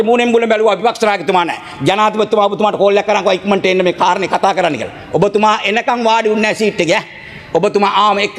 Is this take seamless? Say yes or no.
yes